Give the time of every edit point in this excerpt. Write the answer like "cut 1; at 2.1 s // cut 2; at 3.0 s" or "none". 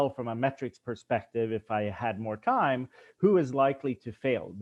none